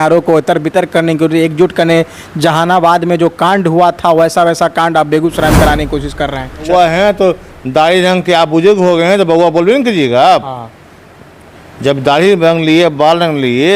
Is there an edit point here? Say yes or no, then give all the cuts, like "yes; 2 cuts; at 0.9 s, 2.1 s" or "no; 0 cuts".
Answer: yes; 1 cut; at 6.7 s